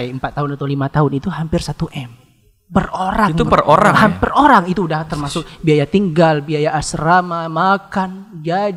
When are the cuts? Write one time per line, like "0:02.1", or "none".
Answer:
none